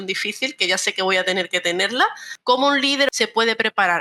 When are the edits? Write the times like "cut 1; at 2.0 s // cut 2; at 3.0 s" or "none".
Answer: cut 1; at 2.3 s // cut 2; at 3.1 s